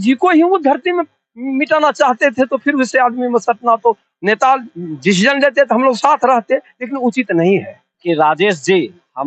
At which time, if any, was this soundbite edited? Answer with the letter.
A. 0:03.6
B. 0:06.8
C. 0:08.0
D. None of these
C